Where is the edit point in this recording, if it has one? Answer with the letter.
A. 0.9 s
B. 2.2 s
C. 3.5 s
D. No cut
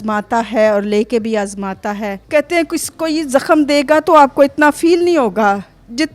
B